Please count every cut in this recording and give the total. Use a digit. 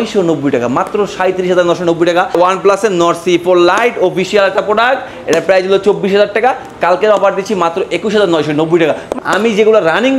2